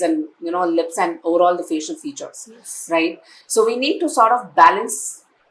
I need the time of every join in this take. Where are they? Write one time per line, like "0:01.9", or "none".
none